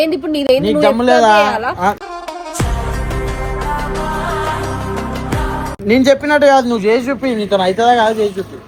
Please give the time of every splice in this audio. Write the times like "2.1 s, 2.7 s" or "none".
none